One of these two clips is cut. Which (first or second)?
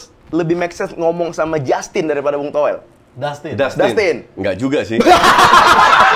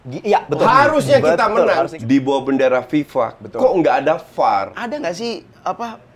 second